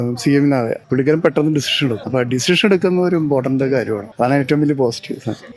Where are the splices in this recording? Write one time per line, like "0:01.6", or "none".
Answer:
0:00.8
0:02.0
0:04.1